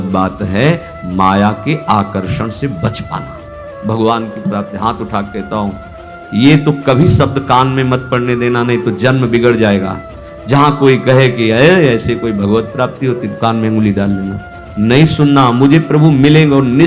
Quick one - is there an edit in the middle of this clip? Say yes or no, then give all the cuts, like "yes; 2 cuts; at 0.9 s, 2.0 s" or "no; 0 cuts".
no; 0 cuts